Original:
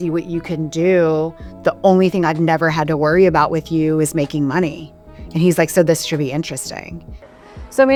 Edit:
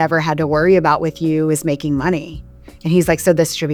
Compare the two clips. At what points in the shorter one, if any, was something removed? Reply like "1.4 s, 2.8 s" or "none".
none